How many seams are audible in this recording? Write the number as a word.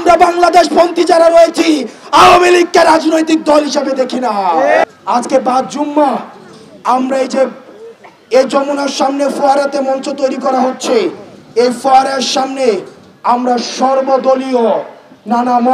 one